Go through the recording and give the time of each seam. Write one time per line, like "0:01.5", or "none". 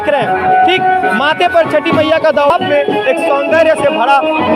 0:02.5